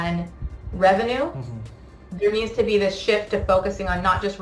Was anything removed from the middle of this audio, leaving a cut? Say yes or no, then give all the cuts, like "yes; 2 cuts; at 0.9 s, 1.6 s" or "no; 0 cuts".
no; 0 cuts